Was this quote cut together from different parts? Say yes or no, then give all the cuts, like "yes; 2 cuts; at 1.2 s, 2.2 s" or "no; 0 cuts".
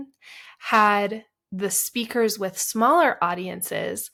no; 0 cuts